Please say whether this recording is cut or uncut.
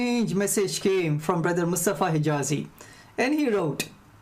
cut